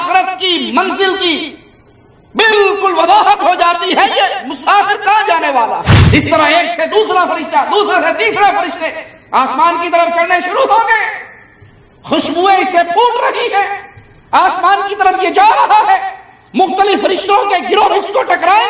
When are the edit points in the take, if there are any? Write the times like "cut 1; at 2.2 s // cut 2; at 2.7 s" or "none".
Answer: cut 1; at 5.9 s